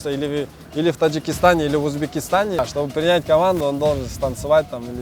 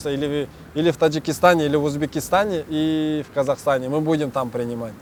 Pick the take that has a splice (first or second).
first